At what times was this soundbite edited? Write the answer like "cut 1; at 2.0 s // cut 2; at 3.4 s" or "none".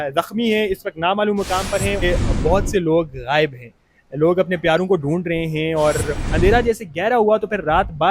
cut 1; at 2.0 s // cut 2; at 6.1 s